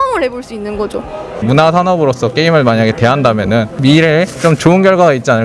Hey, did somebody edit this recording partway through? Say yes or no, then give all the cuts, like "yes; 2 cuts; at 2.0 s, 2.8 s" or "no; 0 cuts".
yes; 2 cuts; at 1.4 s, 3.7 s